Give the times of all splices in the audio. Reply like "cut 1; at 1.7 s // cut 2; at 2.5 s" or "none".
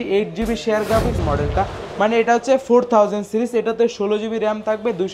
cut 1; at 1.2 s